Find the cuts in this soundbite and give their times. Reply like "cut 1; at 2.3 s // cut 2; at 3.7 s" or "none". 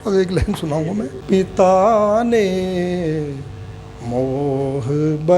cut 1; at 1.2 s